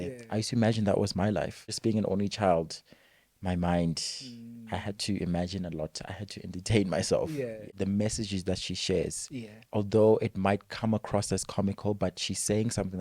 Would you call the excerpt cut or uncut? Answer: cut